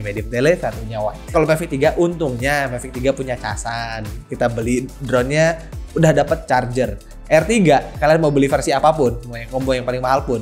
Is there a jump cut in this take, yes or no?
yes